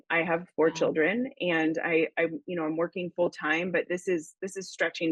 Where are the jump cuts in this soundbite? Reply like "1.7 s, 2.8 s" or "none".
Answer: none